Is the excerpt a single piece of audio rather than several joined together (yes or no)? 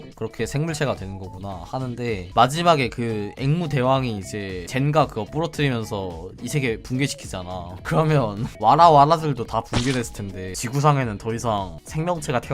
no